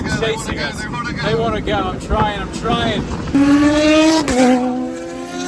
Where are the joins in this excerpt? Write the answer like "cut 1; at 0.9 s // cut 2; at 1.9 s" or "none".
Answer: cut 1; at 3.4 s